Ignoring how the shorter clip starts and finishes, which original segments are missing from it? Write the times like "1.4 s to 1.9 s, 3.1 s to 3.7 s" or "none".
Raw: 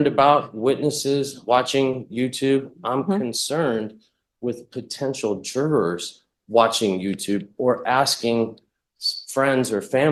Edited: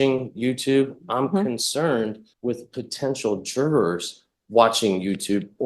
4.0 s to 4.3 s